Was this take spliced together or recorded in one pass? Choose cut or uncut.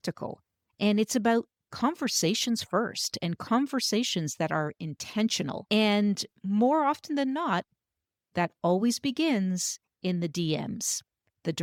uncut